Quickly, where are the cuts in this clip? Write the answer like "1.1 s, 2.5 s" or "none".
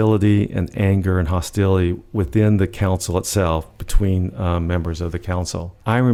none